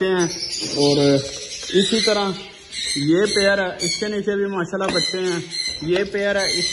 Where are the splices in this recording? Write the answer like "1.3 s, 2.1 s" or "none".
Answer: none